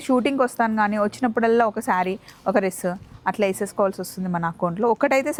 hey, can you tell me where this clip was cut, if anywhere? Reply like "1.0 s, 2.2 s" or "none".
none

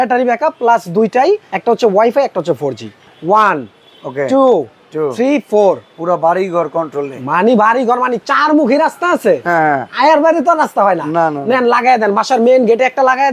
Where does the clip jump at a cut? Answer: 1.5 s, 3.1 s

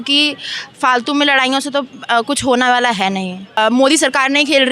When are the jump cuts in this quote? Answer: 3.6 s

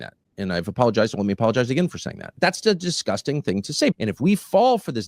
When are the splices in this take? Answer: 2.3 s, 3.9 s

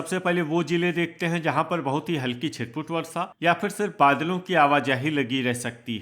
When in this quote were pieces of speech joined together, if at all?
none

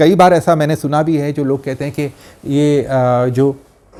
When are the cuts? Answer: none

